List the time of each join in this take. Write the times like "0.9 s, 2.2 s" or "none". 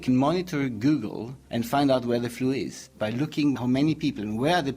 1.3 s, 2.9 s